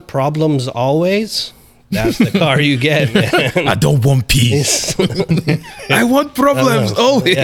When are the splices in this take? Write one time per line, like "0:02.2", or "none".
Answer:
none